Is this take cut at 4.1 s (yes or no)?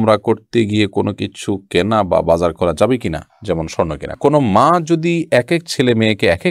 yes